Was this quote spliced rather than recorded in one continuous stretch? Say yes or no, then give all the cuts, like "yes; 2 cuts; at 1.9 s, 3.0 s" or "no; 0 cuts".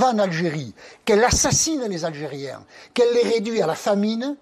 no; 0 cuts